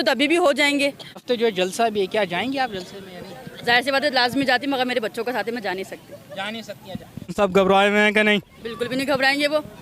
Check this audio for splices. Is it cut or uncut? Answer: cut